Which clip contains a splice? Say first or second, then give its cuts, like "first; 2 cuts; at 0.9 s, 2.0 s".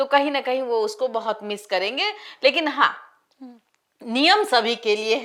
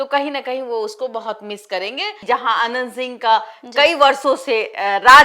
second; 1 cut; at 2.2 s